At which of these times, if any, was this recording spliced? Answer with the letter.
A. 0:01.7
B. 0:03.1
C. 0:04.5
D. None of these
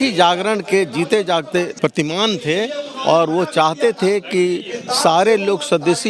A